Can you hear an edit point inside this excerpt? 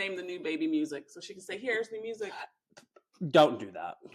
no; 0 cuts

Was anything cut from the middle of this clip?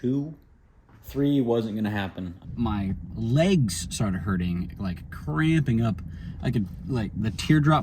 yes; 1 cut; at 2.5 s

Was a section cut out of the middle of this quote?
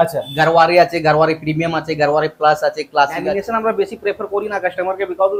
yes; 1 cut; at 3.3 s

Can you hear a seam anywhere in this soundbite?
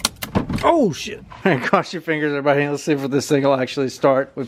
no; 0 cuts

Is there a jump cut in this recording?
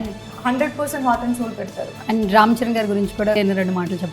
yes; 2 cuts; at 1.9 s, 3.4 s

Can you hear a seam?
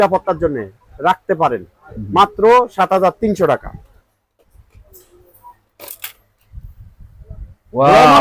no; 0 cuts

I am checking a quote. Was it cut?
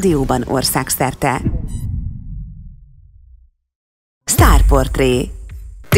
yes; 1 cut; at 4.2 s

